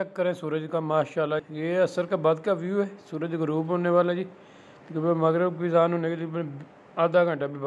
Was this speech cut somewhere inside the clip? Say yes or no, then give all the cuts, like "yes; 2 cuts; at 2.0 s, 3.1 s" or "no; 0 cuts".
no; 0 cuts